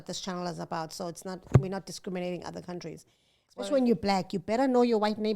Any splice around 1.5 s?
no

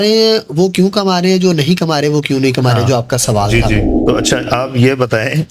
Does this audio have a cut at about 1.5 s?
no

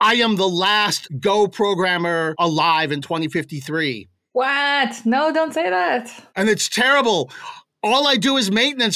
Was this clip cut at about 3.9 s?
no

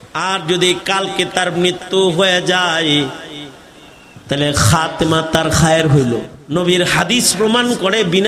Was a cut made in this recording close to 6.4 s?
yes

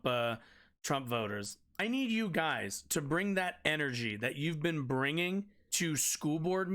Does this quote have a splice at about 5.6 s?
yes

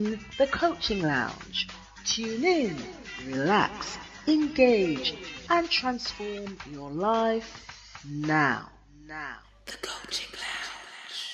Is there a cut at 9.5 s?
yes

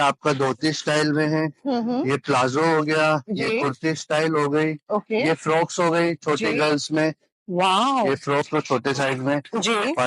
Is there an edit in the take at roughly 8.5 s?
yes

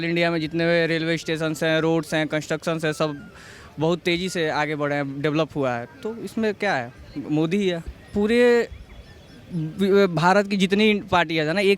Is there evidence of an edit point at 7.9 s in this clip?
yes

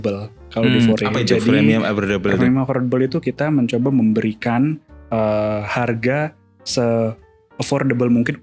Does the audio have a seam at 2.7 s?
no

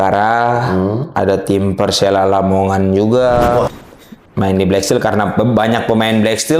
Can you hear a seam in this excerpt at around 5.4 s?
no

